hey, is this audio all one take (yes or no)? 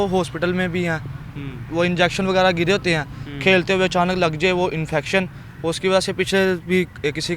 yes